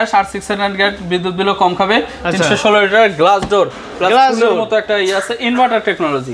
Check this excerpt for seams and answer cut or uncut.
uncut